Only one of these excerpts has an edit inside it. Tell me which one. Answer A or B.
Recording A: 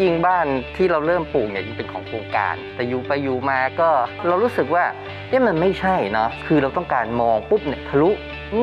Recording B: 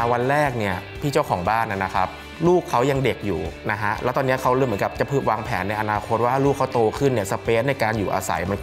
A